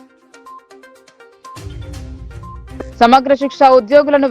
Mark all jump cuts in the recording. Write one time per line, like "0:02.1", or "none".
0:01.0
0:02.8